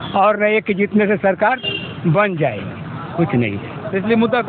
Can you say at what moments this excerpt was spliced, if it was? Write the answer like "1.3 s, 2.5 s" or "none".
none